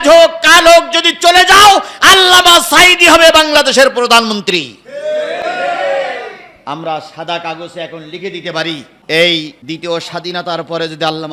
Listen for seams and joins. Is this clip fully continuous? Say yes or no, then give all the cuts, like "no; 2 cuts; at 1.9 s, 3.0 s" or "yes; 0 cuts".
no; 2 cuts; at 8.9 s, 9.6 s